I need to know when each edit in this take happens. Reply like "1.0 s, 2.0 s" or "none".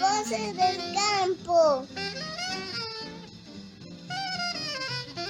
1.8 s

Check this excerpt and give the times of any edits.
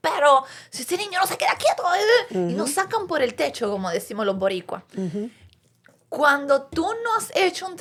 none

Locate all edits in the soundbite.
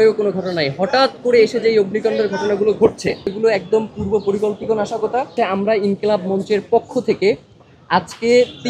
3.4 s, 5.3 s

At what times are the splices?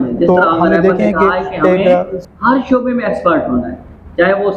2.2 s

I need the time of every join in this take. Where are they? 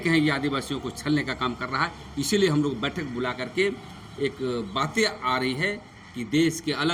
none

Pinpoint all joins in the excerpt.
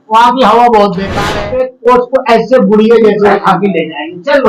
1.2 s

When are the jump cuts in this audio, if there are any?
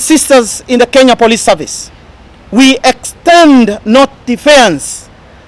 none

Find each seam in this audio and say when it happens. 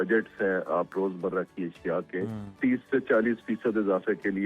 0.9 s, 2.6 s

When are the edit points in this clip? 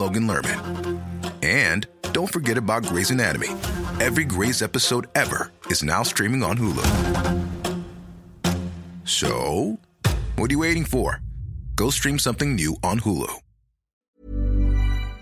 14.0 s

